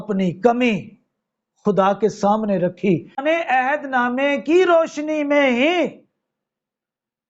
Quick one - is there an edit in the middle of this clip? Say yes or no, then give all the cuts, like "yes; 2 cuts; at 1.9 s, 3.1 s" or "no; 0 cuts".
yes; 1 cut; at 3.2 s